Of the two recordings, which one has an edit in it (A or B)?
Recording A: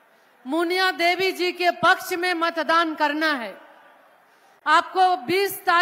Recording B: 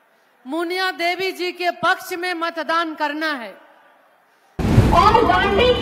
B